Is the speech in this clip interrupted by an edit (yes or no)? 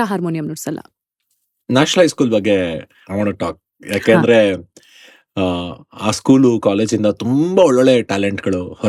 no